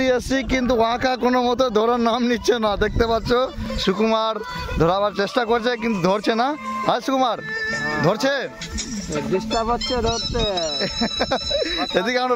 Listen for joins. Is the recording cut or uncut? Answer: uncut